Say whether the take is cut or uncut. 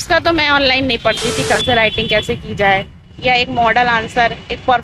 cut